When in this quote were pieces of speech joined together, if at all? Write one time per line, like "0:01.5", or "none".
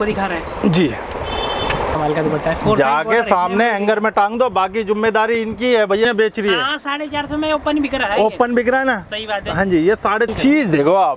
0:01.9
0:06.1
0:10.3